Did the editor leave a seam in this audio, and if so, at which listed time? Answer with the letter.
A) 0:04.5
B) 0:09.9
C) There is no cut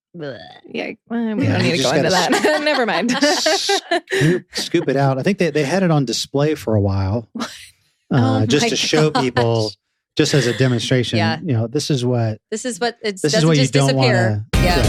C